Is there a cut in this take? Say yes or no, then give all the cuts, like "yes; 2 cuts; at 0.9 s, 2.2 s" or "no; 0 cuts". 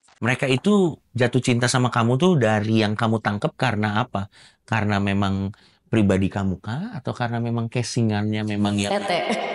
no; 0 cuts